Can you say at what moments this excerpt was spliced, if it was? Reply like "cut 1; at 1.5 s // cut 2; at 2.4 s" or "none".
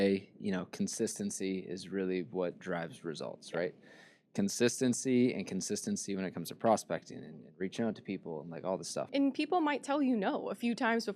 cut 1; at 9.1 s